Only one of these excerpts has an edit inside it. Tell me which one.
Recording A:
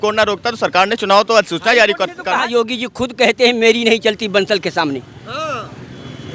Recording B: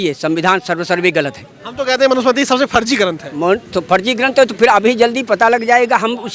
A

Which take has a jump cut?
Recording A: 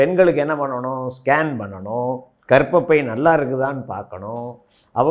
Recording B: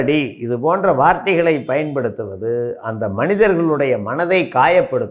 A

